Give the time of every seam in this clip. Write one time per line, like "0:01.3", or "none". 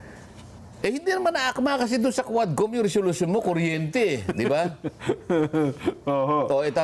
none